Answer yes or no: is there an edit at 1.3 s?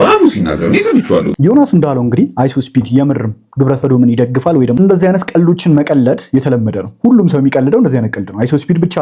yes